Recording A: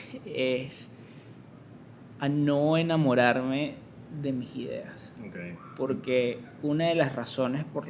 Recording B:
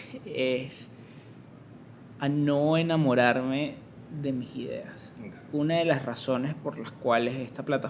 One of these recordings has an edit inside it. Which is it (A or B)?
B